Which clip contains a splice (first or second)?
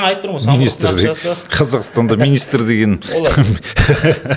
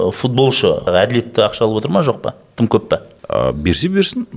second